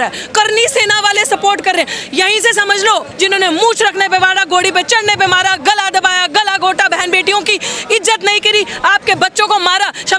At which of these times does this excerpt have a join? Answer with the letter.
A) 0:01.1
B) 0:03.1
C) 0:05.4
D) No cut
B